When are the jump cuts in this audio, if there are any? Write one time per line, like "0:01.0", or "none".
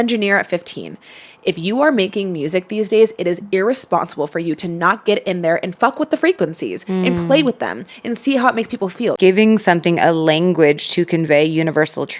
0:05.7
0:09.1